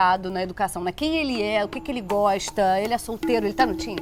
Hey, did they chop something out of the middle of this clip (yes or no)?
no